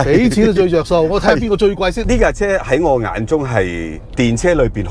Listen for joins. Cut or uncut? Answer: cut